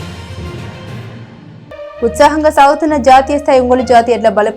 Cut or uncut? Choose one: cut